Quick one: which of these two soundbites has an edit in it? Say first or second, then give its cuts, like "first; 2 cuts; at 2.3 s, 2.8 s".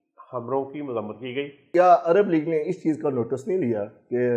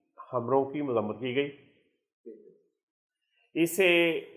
first; 1 cut; at 1.6 s